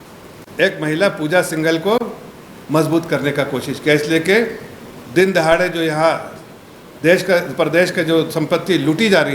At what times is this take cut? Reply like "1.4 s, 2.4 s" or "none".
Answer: none